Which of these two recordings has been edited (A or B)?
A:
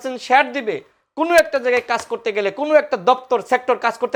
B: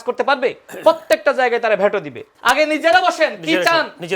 B